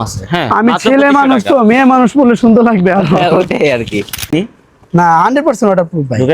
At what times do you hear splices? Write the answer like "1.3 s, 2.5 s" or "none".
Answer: 4.3 s

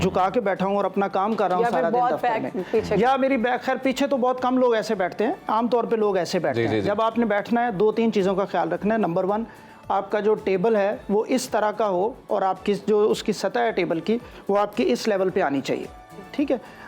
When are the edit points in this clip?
none

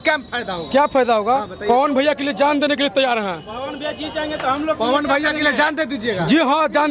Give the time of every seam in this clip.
none

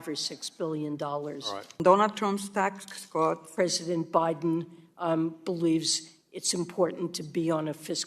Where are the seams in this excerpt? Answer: 1.8 s, 3.5 s

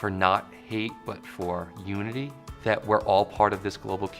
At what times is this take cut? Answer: 2.4 s

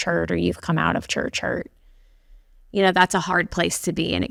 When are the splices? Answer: none

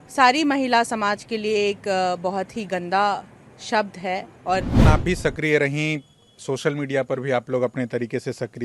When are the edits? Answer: 4.8 s

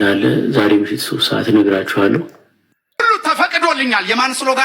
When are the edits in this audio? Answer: 3.0 s

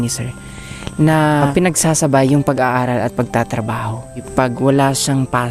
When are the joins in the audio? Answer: 1.5 s, 4.3 s

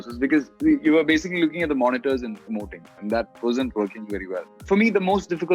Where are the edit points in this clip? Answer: 4.5 s

